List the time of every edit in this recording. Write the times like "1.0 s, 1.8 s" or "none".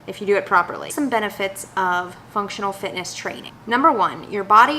0.9 s